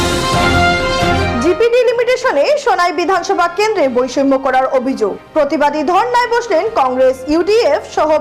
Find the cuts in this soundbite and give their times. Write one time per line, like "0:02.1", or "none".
0:01.0

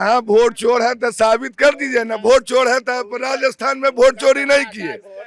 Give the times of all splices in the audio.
none

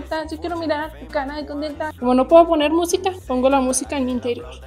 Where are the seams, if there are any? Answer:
0:01.9
0:03.2

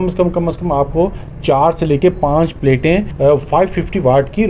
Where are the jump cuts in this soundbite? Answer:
0:03.1

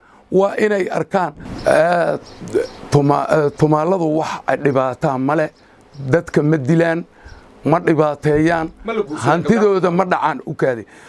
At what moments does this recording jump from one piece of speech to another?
0:01.4

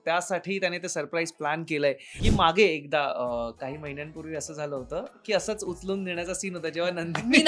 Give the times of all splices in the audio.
0:02.1

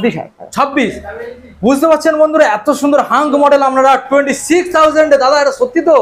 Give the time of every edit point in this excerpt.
none

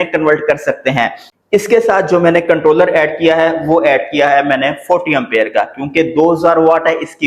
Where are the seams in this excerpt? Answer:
0:01.2

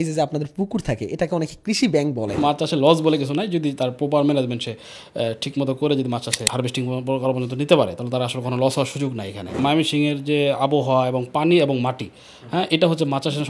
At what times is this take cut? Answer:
0:02.4
0:06.5
0:09.6

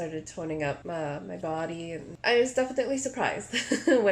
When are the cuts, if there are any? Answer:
0:00.8
0:02.0

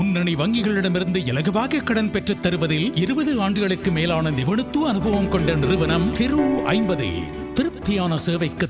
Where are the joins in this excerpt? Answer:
none

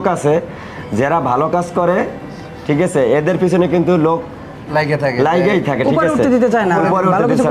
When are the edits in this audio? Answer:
none

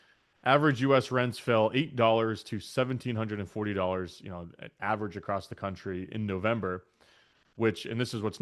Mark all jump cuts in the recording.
none

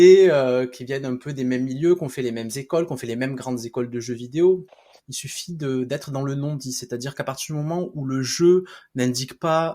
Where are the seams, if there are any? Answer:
0:04.8

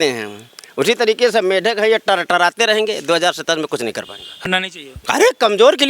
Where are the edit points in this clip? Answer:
0:04.5

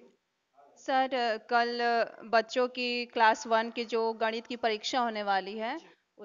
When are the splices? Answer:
none

